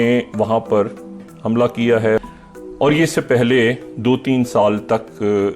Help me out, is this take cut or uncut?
cut